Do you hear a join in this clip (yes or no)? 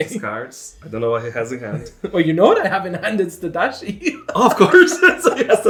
no